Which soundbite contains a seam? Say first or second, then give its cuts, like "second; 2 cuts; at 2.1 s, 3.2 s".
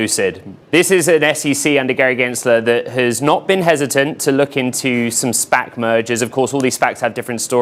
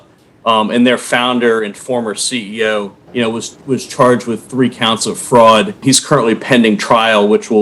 second; 2 cuts; at 3.0 s, 5.8 s